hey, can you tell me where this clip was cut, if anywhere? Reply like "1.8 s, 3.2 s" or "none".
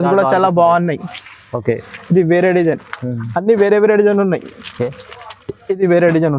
none